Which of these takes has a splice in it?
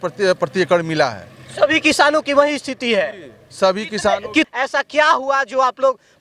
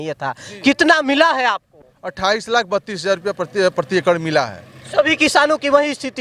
first; 1 cut; at 4.5 s

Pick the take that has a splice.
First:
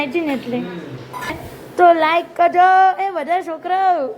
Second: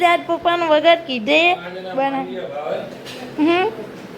first; 1 cut; at 1.3 s

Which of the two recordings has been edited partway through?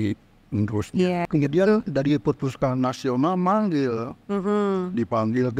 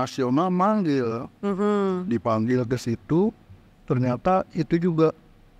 first; 1 cut; at 1.2 s

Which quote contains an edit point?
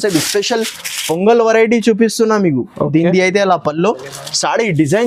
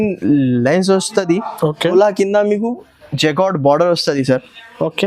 second; 1 cut; at 1.8 s

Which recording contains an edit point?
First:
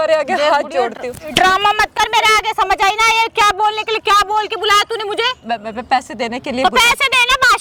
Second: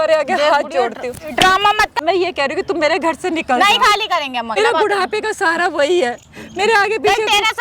second; 2 cuts; at 1.9 s, 4.5 s

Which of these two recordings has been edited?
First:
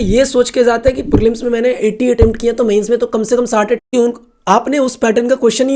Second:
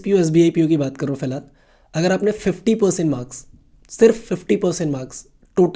first; 1 cut; at 3.8 s

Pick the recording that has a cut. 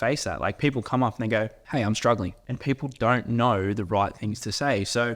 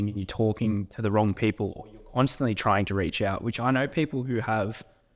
first; 2 cuts; at 1.6 s, 2.4 s

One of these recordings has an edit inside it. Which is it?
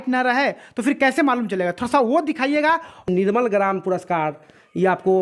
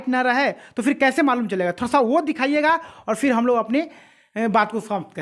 first; 1 cut; at 3.1 s

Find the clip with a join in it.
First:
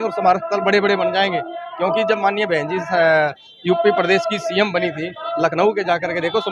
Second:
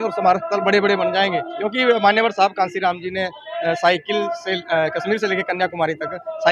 second; 1 cut; at 1.5 s

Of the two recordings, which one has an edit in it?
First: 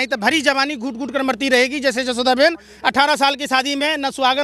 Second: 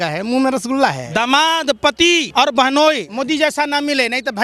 second; 3 cuts; at 1.0 s, 2.3 s, 3.1 s

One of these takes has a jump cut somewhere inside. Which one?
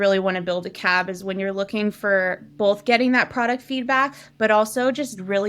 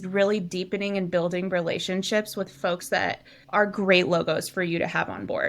second; 1 cut; at 3.3 s

